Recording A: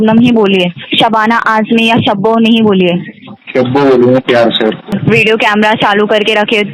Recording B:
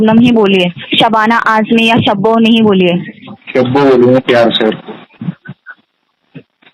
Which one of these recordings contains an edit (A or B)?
A